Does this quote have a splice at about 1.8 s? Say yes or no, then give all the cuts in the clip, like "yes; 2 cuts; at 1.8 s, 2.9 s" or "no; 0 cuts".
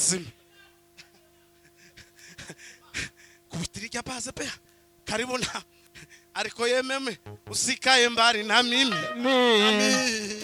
no; 0 cuts